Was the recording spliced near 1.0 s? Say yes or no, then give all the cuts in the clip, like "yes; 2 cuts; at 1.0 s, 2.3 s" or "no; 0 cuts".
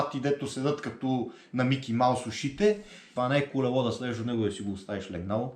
no; 1 cut; at 3.0 s